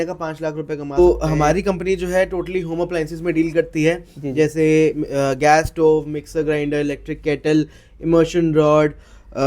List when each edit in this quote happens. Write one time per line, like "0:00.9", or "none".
0:01.0

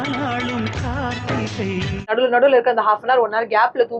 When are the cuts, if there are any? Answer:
0:02.0

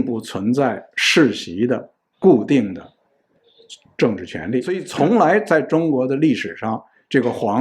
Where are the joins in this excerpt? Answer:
0:04.9

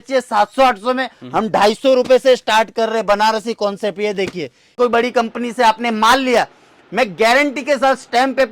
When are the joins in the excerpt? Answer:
0:04.8

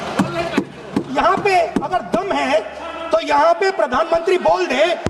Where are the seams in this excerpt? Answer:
none

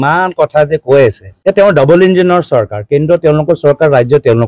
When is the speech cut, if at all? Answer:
0:01.3

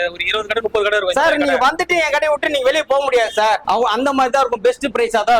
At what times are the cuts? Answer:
0:03.6

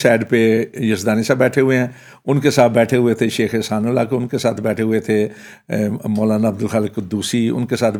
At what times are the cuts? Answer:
none

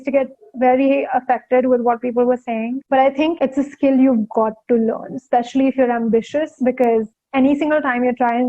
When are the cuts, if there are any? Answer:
none

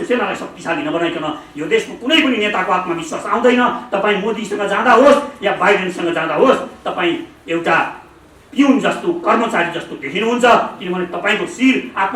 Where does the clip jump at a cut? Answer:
none

